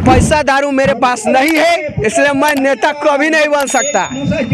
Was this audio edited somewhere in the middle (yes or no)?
no